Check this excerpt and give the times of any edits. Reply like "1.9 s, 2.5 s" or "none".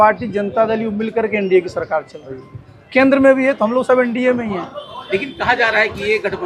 none